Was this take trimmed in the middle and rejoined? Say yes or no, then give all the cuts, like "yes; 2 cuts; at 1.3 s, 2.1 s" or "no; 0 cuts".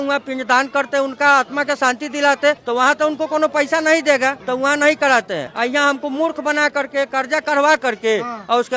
no; 0 cuts